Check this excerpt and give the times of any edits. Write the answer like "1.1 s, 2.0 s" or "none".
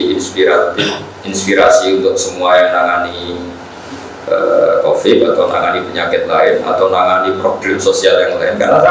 none

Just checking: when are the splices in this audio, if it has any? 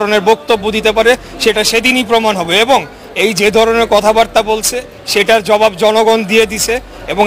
none

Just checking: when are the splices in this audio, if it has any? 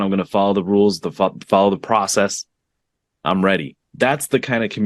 3.8 s

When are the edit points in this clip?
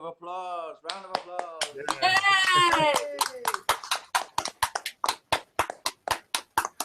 none

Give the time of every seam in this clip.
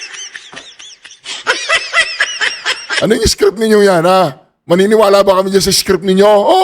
2.1 s, 2.8 s

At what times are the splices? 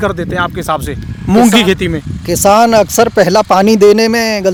none

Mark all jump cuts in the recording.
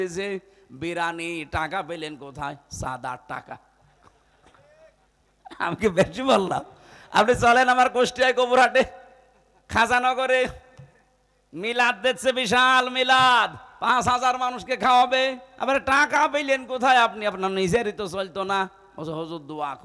none

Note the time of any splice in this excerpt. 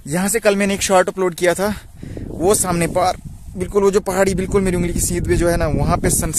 none

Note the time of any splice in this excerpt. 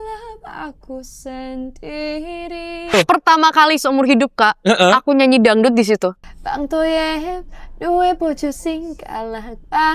2.9 s, 6.2 s

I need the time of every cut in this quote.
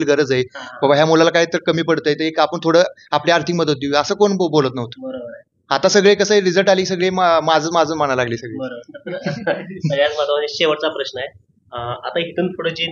none

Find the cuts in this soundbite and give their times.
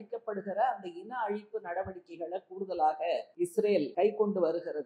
3.6 s

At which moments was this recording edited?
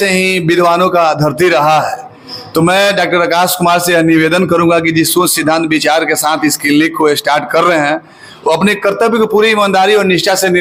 none

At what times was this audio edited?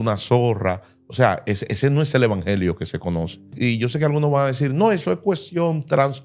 3.5 s

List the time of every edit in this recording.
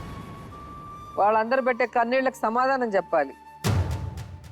0.9 s

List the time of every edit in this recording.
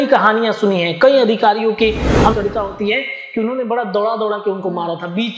2.3 s

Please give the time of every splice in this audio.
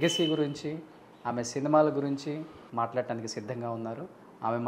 2.6 s

